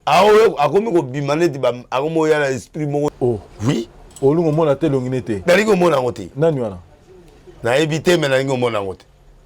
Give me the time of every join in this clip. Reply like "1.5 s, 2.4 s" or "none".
3.1 s